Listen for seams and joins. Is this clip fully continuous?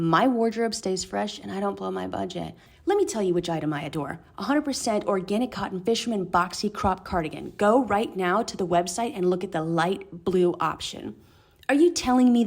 no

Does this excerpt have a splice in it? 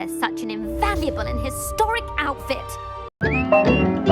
yes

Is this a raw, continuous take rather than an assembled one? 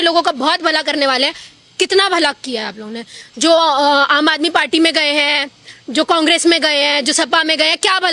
yes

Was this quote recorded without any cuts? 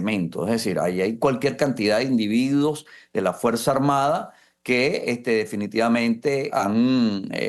no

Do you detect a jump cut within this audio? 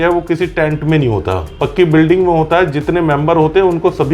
no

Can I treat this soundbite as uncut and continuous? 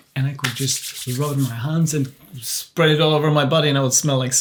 yes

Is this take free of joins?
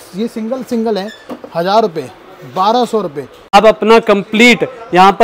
no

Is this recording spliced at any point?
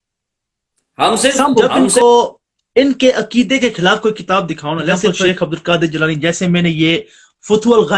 yes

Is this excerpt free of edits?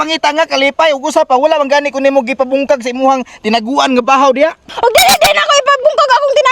no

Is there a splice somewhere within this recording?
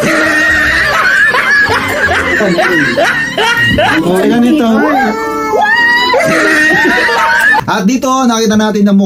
no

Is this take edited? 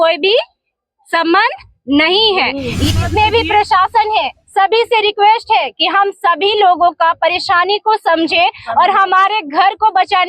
yes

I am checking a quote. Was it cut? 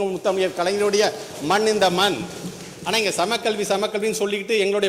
no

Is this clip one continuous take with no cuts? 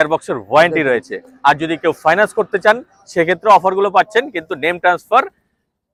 yes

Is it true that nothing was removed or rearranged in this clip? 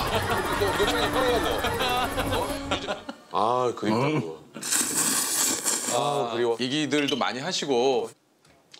no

